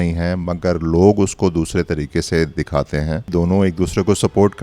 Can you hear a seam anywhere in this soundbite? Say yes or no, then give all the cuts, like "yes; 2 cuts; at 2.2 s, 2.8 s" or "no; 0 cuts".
yes; 1 cut; at 3.3 s